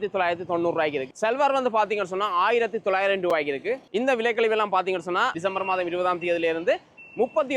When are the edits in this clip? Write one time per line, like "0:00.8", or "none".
0:01.0
0:03.9
0:05.4